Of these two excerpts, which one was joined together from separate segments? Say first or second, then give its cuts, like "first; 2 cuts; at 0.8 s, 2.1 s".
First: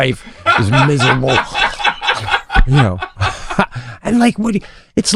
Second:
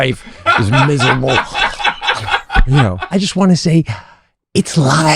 second; 1 cut; at 3.1 s